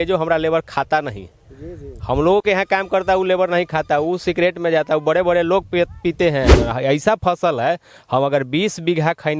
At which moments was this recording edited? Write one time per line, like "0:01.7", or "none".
0:06.6